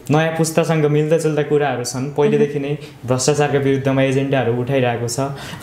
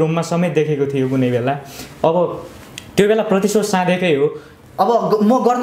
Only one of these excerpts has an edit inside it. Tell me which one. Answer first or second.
second